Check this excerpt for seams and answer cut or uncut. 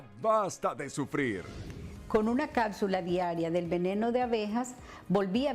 uncut